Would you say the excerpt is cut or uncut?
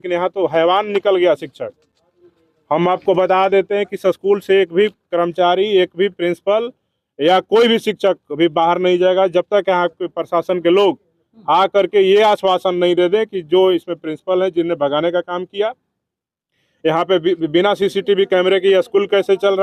uncut